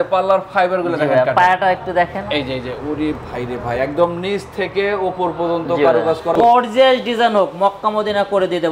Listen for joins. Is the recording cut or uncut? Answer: cut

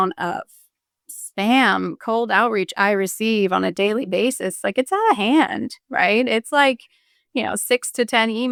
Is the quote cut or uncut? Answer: uncut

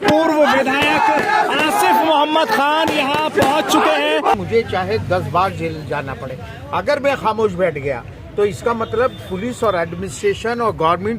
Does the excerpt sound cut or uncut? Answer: cut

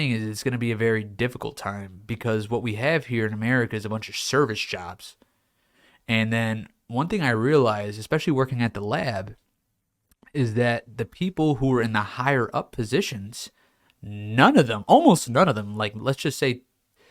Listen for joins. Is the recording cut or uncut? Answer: uncut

